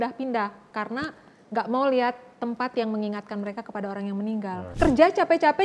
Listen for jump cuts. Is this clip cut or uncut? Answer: cut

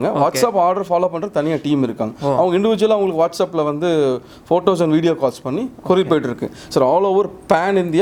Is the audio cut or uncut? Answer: uncut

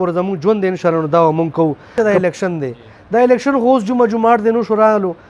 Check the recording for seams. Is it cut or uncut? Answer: cut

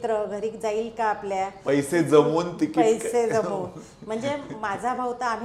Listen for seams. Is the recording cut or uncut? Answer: uncut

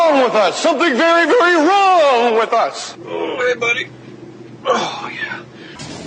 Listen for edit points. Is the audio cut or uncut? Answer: cut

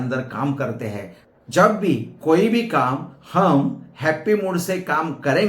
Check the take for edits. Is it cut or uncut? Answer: cut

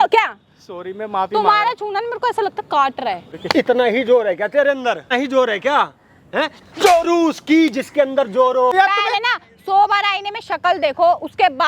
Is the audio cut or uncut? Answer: cut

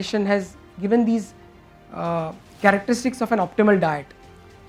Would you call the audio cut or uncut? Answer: uncut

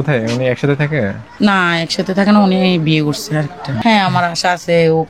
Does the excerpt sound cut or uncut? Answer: cut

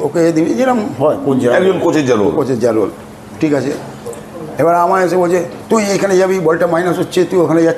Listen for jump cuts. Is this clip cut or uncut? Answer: uncut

